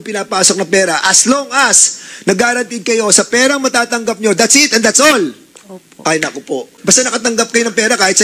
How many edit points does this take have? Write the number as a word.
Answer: one